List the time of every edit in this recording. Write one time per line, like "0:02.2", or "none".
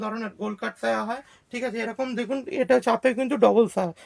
none